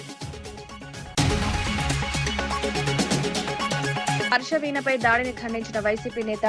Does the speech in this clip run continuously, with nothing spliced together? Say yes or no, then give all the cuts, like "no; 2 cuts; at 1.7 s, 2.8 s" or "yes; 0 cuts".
no; 1 cut; at 0.9 s